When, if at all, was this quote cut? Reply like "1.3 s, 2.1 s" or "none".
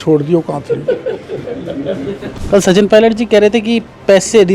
2.3 s